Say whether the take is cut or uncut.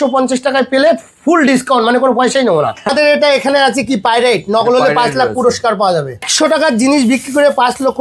cut